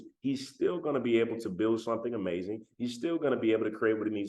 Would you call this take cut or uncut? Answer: uncut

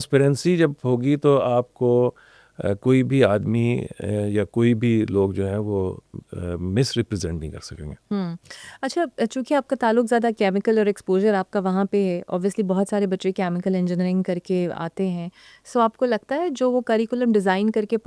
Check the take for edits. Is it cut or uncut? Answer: uncut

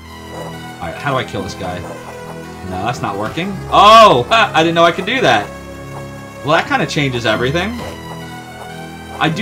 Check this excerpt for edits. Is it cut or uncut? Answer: uncut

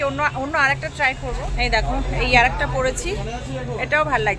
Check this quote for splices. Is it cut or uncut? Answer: cut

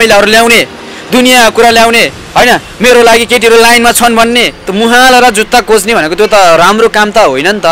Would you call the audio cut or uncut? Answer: cut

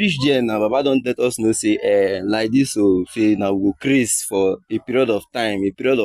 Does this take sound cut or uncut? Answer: uncut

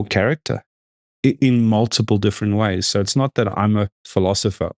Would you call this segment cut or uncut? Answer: uncut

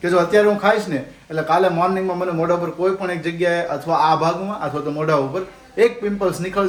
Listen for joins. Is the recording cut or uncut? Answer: uncut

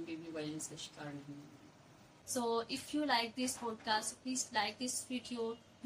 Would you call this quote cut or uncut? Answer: uncut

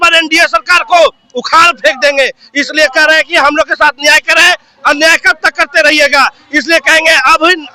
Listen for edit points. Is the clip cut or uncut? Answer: uncut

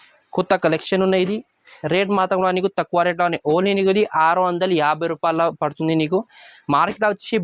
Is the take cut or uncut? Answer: uncut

